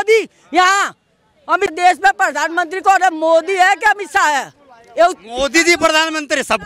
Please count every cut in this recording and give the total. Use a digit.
1